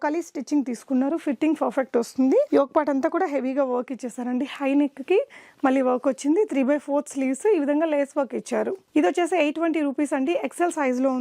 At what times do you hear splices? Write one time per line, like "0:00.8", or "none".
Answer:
none